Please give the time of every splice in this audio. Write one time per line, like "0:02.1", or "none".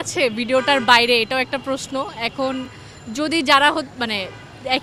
none